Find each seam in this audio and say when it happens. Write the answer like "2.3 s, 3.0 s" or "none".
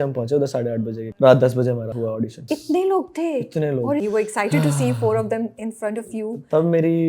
1.0 s, 2.4 s, 4.0 s